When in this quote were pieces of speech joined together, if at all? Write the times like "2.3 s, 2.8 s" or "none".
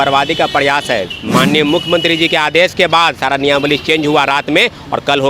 1.2 s